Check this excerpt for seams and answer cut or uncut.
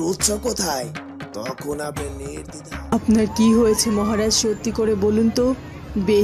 cut